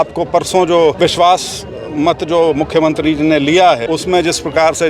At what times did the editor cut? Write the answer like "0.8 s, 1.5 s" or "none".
1.0 s, 3.8 s